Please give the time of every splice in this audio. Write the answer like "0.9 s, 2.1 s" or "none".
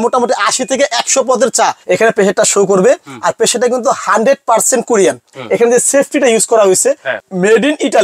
1.8 s, 5.3 s, 7.1 s